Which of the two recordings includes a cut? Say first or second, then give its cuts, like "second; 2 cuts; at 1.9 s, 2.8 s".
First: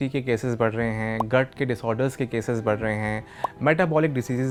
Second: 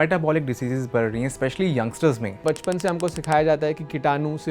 second; 1 cut; at 2.4 s